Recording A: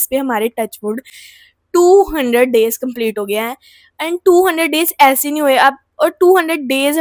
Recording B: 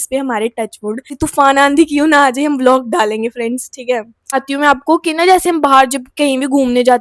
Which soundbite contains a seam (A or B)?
B